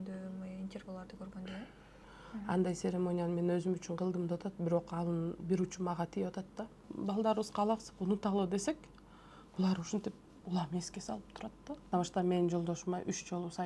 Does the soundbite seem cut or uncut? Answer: cut